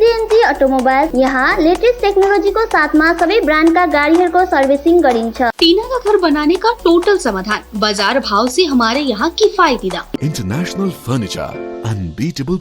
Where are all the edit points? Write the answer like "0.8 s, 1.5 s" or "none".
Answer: 1.1 s, 5.5 s, 10.2 s